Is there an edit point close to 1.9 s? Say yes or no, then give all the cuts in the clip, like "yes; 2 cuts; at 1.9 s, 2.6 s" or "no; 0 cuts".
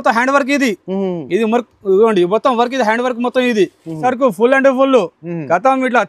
no; 1 cut; at 4.0 s